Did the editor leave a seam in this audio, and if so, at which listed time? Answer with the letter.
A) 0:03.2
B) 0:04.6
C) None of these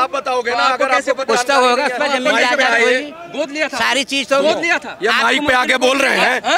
C